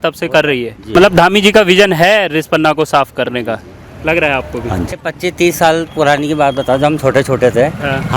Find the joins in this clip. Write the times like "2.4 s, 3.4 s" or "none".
0.9 s, 4.9 s